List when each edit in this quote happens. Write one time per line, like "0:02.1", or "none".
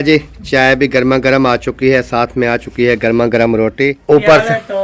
0:03.9